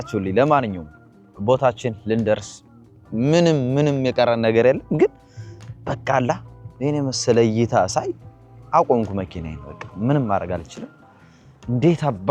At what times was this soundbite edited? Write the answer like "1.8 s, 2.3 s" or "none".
none